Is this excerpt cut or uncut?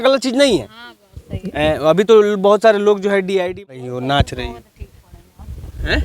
cut